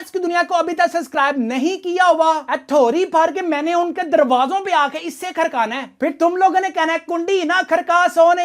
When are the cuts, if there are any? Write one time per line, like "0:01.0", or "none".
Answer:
none

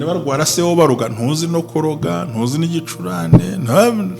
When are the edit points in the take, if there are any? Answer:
none

